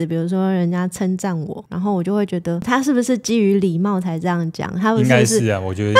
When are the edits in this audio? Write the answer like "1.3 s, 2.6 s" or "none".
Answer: none